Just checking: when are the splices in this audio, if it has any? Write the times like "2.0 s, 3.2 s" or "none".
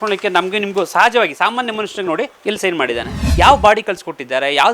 2.3 s, 3.3 s